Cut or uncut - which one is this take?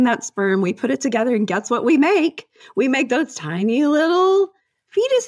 uncut